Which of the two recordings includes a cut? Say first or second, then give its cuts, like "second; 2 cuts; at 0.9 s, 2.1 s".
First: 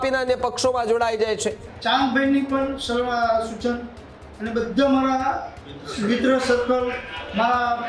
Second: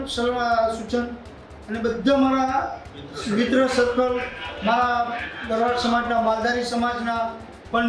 first; 1 cut; at 1.7 s